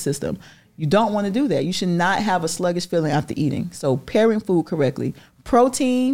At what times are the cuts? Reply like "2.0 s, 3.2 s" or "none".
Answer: none